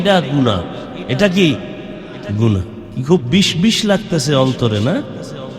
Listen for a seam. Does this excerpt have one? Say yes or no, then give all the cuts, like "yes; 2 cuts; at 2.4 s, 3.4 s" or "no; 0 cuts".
yes; 2 cuts; at 1.0 s, 2.8 s